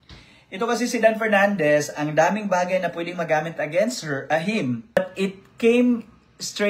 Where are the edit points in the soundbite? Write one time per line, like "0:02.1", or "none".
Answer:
0:05.0